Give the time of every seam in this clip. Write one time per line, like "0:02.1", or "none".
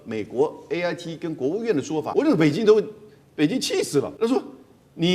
0:02.1
0:04.1

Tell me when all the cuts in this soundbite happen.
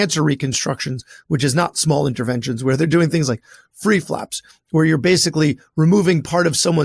none

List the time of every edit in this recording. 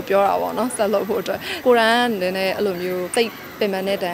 0:01.6
0:03.1

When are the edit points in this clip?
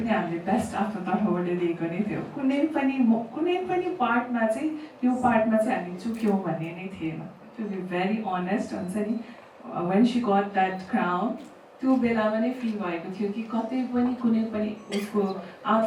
none

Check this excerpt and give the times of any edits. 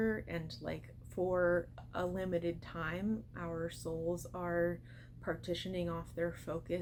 none

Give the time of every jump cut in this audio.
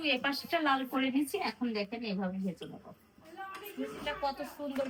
none

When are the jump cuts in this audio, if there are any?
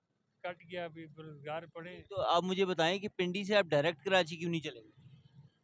none

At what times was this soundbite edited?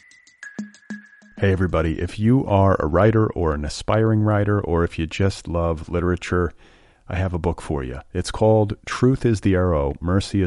0:00.9

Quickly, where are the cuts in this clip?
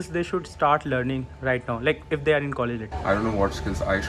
0:02.9

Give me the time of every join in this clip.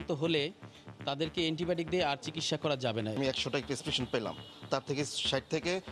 0:03.2

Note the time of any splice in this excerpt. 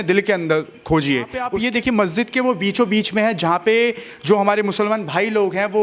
0:01.5

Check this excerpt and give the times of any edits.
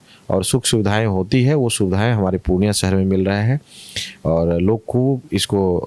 none

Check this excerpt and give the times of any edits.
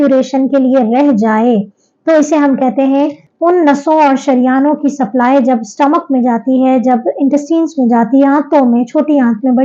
0:03.2

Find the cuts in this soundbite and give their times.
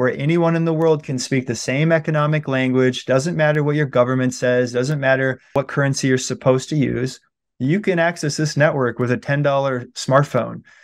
0:05.5

